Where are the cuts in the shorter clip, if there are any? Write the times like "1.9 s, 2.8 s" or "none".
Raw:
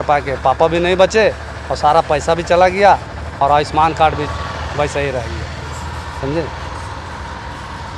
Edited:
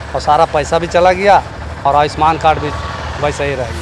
none

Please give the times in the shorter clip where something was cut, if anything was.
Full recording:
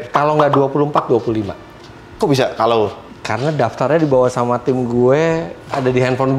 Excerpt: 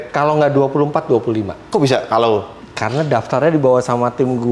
1.6 s

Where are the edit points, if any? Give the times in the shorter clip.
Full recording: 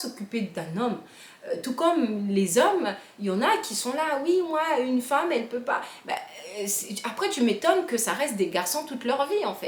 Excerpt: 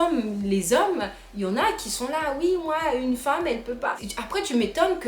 4.1 s

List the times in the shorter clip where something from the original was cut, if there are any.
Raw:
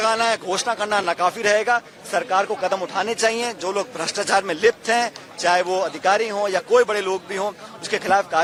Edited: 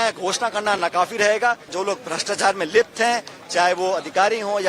1.7 s

